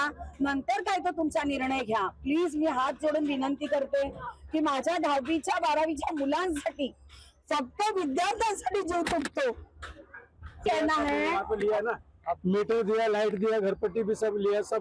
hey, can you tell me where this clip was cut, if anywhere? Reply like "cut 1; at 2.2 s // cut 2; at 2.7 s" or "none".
cut 1; at 10.6 s